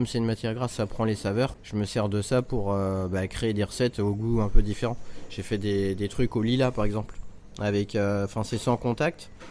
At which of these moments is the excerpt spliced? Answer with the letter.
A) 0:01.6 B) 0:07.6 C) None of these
A